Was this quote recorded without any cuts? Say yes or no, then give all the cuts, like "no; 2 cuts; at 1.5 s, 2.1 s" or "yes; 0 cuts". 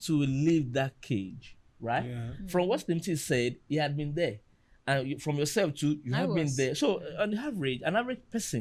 yes; 0 cuts